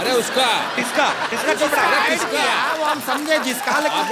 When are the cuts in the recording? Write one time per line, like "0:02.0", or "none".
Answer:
none